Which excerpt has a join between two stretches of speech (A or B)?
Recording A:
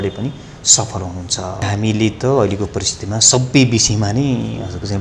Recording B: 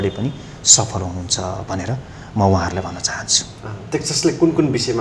A